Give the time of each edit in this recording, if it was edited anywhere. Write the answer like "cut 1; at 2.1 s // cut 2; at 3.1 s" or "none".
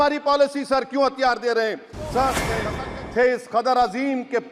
cut 1; at 2.6 s